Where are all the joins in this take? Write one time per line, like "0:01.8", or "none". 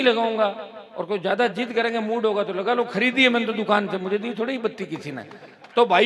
none